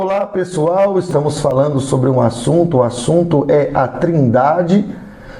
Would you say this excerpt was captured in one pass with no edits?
no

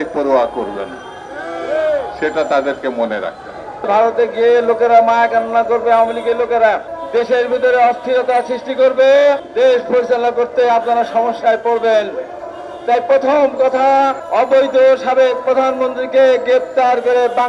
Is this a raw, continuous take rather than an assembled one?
no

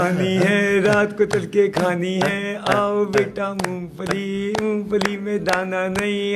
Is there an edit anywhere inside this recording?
no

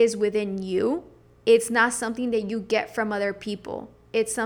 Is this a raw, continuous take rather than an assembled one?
yes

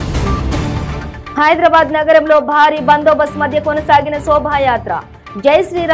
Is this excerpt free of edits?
no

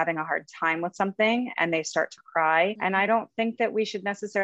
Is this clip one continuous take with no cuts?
no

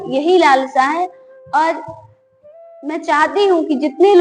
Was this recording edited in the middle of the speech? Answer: no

